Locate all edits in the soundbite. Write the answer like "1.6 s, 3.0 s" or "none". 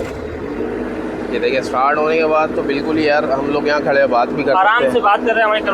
none